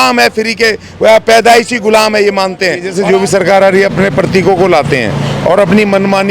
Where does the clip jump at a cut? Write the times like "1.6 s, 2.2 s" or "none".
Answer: 2.9 s